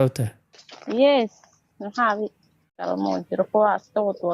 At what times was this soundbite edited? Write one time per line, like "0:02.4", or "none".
0:02.9

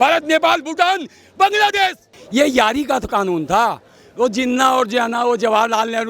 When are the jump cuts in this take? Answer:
0:02.1

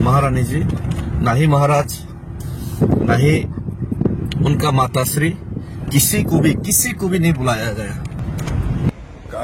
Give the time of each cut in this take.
0:08.2

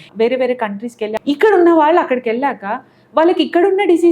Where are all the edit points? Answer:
0:01.2

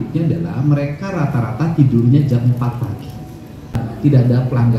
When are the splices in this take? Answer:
0:03.8

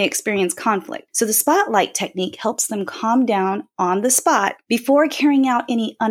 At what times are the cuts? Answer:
0:01.0
0:04.6

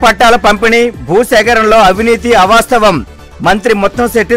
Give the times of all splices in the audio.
none

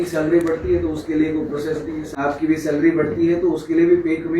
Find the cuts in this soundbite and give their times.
0:02.1

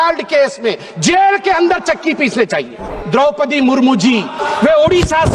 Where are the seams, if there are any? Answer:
0:02.9
0:04.4

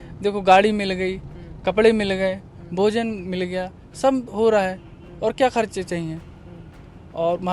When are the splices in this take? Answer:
none

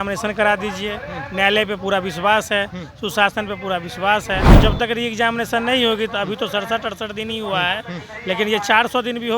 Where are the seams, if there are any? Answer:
0:04.5

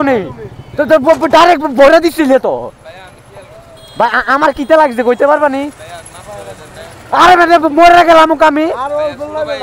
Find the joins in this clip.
none

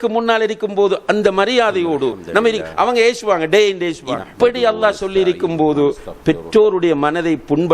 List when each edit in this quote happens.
0:04.3

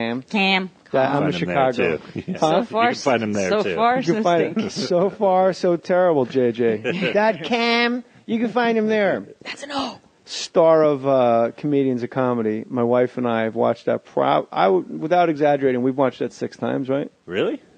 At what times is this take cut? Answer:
0:01.0

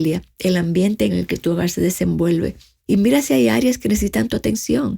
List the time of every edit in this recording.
0:01.1
0:02.7

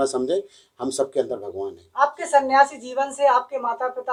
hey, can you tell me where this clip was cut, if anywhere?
none

